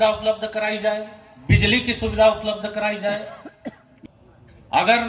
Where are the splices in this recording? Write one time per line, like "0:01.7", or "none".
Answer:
0:03.9